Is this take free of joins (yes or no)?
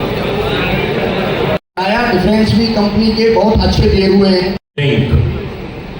no